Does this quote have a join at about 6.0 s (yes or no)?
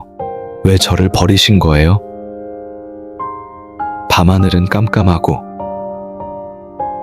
no